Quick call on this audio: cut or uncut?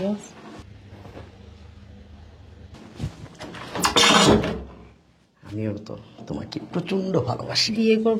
uncut